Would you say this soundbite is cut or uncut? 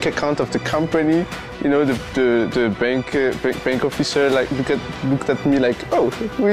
uncut